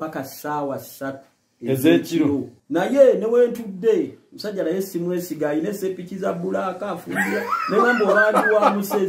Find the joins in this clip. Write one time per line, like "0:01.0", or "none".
0:02.6